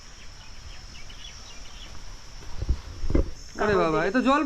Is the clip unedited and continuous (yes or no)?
no